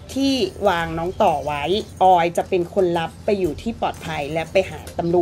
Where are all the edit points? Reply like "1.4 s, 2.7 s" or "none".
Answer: none